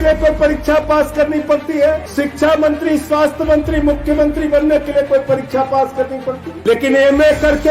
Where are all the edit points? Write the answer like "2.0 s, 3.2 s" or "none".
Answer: 2.1 s, 6.5 s